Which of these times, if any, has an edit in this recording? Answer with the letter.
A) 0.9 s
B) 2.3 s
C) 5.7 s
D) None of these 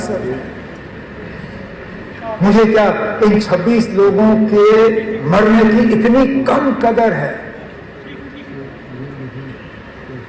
A